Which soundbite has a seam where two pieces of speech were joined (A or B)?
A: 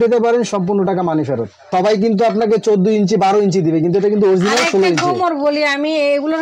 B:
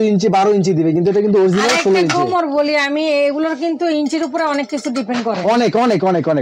A